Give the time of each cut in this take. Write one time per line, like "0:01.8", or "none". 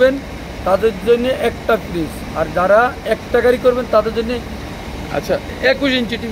none